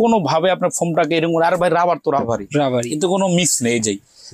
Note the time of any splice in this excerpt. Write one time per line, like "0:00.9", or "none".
none